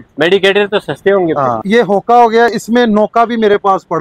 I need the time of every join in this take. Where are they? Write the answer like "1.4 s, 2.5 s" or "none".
1.6 s